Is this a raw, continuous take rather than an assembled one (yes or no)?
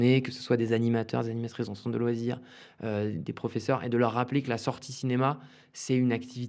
yes